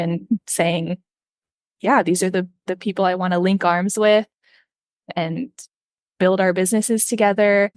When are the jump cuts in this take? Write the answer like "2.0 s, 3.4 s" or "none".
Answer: none